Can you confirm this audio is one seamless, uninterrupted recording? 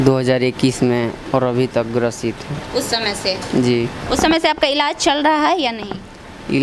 yes; 0 cuts

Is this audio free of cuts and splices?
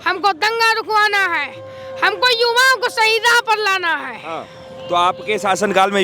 yes; 0 cuts

